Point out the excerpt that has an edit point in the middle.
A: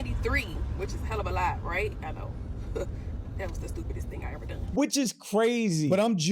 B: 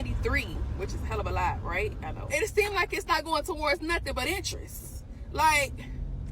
B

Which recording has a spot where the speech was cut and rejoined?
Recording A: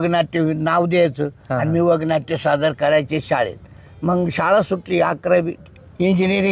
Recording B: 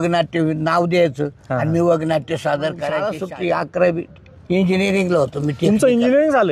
B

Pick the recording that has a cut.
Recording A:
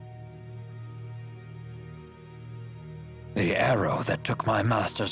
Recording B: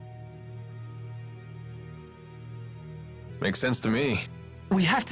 A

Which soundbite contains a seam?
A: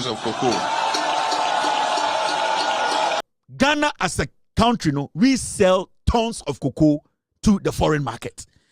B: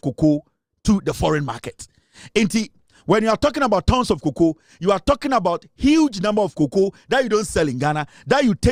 A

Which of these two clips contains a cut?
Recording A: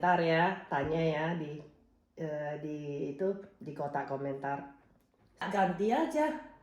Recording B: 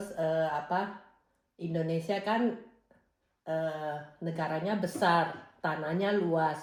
A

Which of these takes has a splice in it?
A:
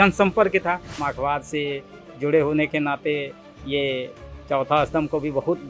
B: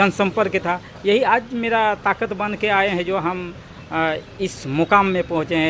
A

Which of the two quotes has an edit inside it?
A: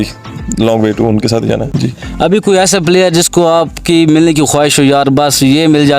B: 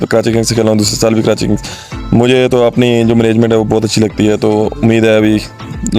A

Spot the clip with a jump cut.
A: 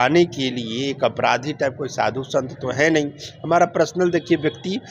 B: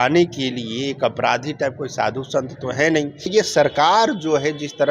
B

